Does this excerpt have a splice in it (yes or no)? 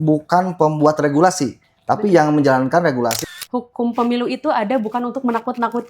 yes